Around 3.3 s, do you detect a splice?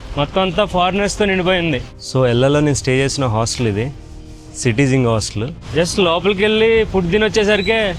no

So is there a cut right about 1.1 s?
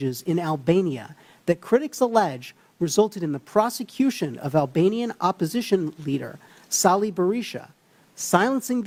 no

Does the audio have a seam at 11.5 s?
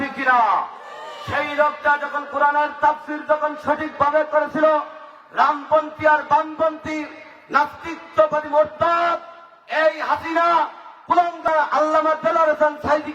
yes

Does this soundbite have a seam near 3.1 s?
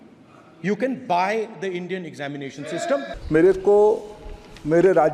yes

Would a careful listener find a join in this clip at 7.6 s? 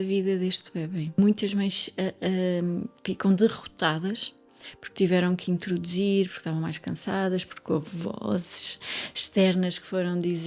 no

